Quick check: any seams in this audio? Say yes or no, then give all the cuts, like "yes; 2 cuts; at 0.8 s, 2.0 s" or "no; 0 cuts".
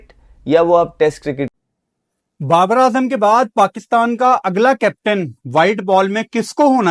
yes; 1 cut; at 1.5 s